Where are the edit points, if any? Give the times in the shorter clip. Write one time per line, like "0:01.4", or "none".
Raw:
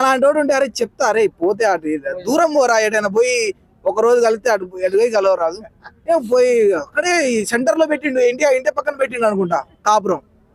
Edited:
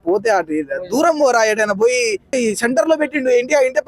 0:02.3